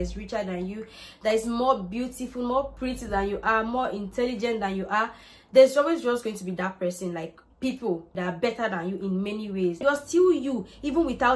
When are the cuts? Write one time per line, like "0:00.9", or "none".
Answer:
0:08.2
0:09.8